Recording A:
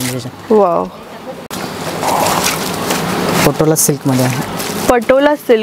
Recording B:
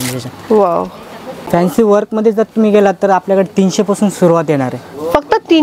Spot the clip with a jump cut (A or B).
B